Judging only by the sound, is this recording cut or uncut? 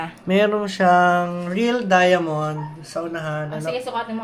uncut